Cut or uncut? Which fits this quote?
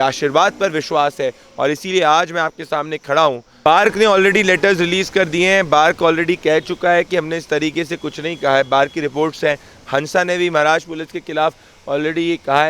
cut